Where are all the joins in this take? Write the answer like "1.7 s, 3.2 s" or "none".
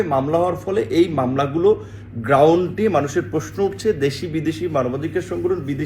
none